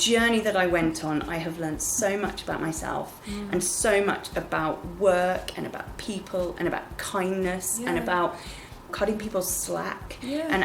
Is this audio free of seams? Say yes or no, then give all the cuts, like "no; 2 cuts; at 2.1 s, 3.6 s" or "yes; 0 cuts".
no; 1 cut; at 8.9 s